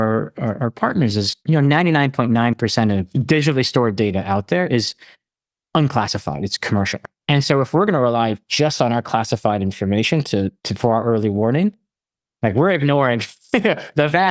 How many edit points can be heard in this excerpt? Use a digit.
2